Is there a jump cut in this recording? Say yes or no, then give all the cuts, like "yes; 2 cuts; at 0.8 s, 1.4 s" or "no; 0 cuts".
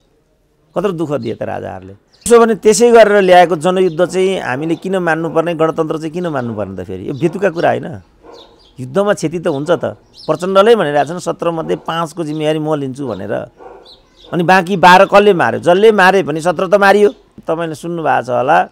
yes; 2 cuts; at 2.3 s, 17.3 s